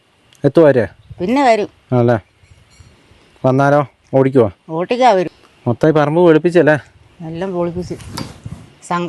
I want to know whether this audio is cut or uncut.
cut